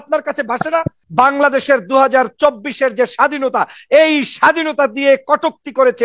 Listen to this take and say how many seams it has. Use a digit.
1